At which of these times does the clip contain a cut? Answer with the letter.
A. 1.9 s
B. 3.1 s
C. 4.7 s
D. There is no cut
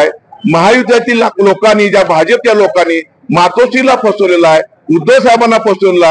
D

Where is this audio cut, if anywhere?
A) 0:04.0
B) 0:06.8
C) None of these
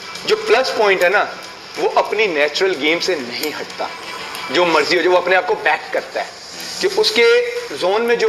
C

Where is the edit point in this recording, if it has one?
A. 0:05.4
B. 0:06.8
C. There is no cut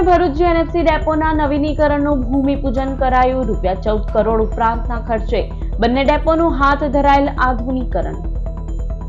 C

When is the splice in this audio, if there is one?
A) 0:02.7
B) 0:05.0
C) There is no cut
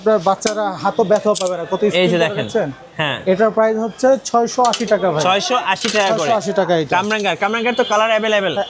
C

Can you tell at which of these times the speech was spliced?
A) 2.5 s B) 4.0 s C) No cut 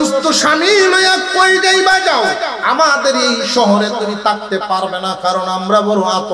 A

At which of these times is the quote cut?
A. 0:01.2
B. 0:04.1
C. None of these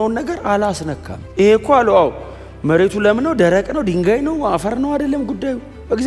C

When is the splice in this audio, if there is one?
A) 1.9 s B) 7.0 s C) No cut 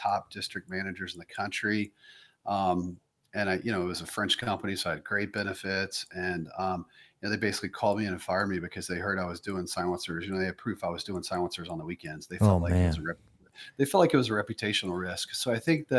C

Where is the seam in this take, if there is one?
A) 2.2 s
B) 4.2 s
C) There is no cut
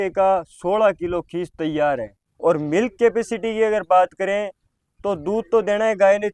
A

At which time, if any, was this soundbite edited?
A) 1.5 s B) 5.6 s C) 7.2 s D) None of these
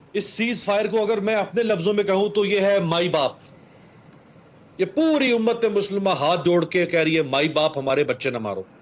D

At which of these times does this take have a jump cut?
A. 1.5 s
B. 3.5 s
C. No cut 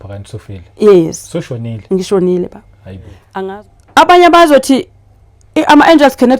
B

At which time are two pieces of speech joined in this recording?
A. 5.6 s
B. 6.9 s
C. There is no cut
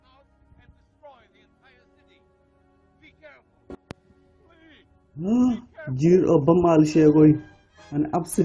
A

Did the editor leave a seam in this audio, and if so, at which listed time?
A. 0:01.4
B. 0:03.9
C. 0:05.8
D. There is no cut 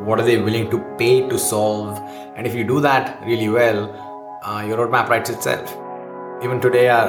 C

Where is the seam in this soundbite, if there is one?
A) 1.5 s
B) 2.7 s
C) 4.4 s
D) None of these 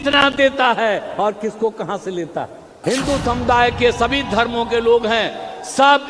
B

